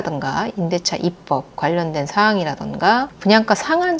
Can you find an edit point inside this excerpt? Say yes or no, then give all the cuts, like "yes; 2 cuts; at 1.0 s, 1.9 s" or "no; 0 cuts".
no; 0 cuts